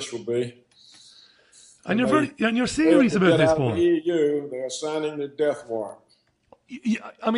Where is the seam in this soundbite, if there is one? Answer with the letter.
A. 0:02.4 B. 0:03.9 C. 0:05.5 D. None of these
C